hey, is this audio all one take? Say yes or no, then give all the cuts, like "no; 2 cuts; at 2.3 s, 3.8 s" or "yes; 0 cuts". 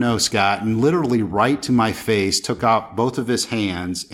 yes; 0 cuts